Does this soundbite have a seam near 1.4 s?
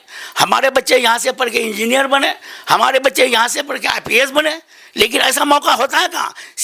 no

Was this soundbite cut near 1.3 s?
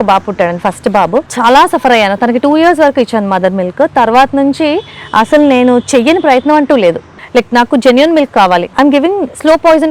yes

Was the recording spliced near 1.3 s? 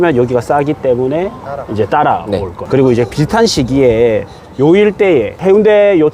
no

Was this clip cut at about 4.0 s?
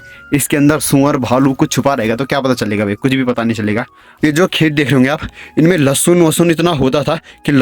yes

